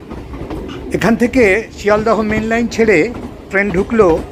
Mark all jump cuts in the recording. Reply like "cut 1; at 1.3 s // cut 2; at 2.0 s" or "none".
cut 1; at 1.1 s

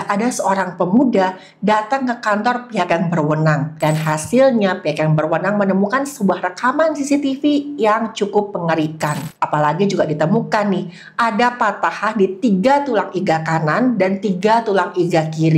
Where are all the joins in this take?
cut 1; at 3.7 s // cut 2; at 9.3 s

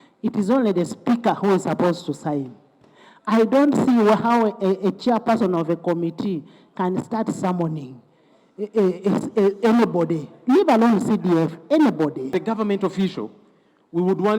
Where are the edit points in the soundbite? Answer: cut 1; at 12.3 s

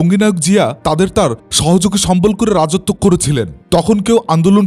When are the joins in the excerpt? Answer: cut 1; at 3.5 s

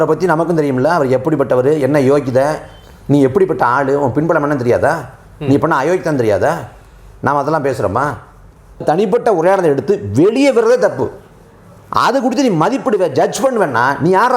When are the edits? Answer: cut 1; at 8.8 s

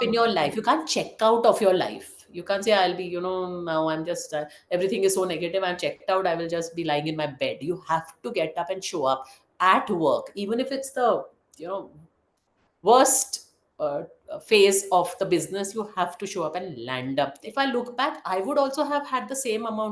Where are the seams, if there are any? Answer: cut 1; at 17.4 s

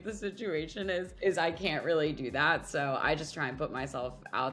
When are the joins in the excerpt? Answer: cut 1; at 1.1 s

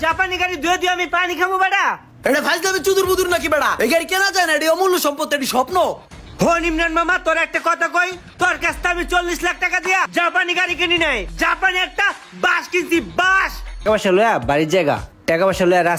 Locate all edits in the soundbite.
cut 1; at 11.3 s // cut 2; at 13.8 s

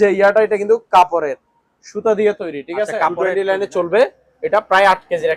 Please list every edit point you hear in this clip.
cut 1; at 3.1 s

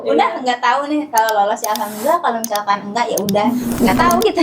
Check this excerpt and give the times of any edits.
cut 1; at 3.5 s

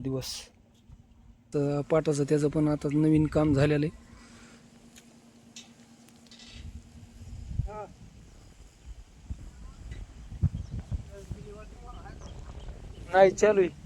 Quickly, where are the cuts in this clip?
cut 1; at 1.5 s

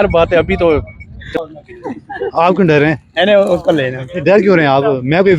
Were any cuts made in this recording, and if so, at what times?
cut 1; at 1.2 s

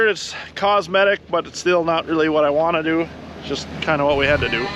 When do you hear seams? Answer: none

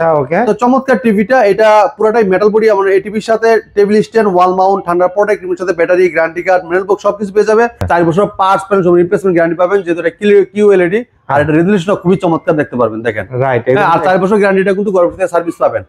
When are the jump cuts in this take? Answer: cut 1; at 7.8 s

